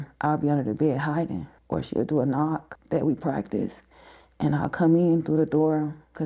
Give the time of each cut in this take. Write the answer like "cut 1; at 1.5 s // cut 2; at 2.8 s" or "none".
cut 1; at 1.5 s // cut 2; at 2.7 s